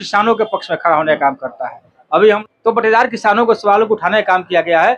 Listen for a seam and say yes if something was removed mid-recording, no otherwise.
yes